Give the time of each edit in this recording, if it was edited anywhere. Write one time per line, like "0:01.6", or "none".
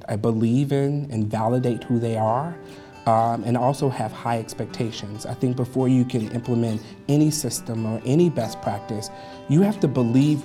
none